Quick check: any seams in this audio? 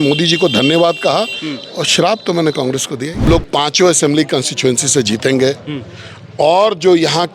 yes; 1 cut; at 3.2 s

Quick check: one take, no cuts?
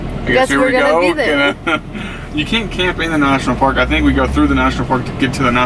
yes; 0 cuts

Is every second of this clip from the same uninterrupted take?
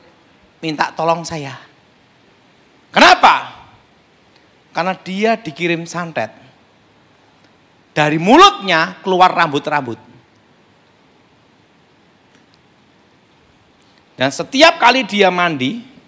yes; 0 cuts

